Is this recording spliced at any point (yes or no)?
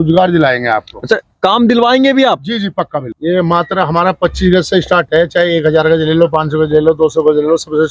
yes